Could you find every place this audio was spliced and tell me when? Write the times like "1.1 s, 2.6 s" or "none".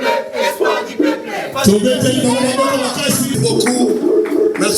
3.3 s